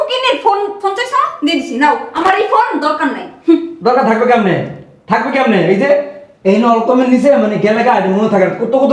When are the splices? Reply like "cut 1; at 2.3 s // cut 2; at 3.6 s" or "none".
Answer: none